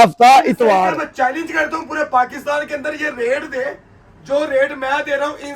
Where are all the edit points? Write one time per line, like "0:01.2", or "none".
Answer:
0:01.0